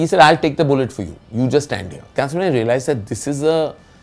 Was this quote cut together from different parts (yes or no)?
yes